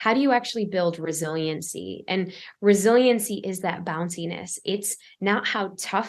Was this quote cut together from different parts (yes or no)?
no